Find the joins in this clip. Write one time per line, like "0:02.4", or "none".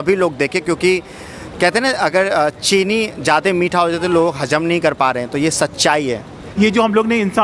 0:06.4